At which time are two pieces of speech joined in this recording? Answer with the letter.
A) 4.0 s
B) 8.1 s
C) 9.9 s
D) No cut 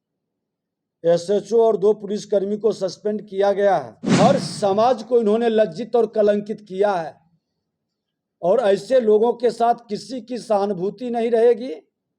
A